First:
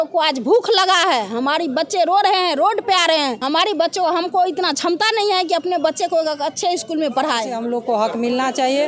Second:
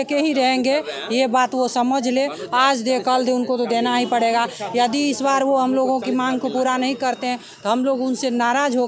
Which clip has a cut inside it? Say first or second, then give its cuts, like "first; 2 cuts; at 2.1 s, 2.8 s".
first; 2 cuts; at 3.4 s, 7.5 s